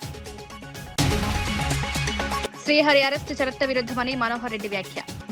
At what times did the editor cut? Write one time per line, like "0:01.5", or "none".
0:00.9
0:02.4